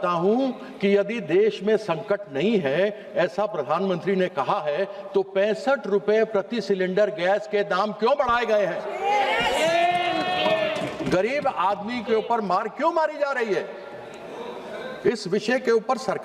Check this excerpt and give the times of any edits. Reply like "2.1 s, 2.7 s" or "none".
none